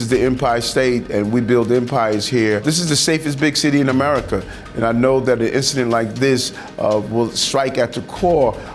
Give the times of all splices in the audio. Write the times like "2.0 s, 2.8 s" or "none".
2.6 s